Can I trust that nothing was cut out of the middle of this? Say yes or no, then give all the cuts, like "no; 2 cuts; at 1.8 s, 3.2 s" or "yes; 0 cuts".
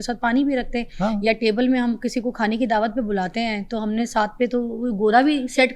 yes; 0 cuts